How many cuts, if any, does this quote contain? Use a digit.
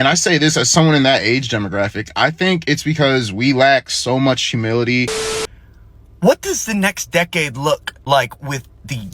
1